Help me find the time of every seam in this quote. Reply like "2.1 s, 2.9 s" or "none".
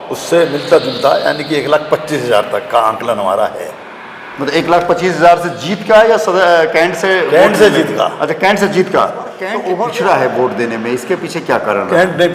9.7 s